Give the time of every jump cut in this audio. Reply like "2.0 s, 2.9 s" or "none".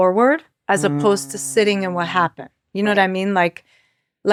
none

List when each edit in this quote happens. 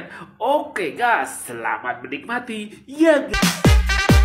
3.3 s

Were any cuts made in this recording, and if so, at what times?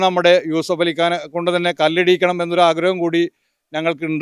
none

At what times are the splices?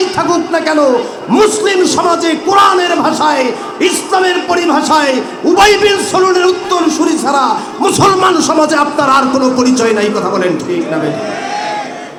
none

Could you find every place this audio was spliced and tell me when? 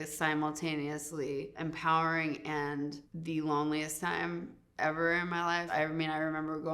5.6 s

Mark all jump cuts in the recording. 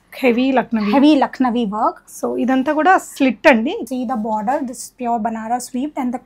3.8 s

